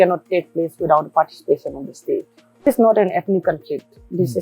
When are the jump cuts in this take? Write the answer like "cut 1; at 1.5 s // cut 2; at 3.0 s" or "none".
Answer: cut 1; at 2.7 s